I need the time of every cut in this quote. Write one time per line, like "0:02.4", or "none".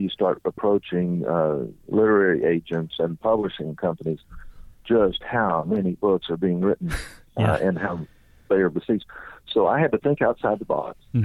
none